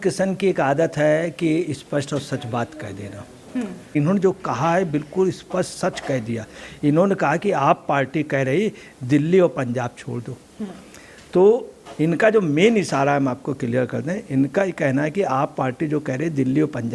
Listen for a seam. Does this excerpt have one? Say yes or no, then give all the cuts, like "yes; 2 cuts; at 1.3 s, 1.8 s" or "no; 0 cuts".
yes; 1 cut; at 3.9 s